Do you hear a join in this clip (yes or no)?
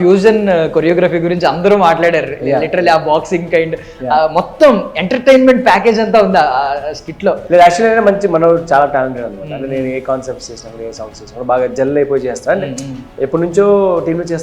yes